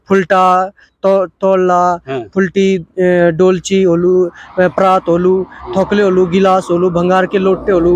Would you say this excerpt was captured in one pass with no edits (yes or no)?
yes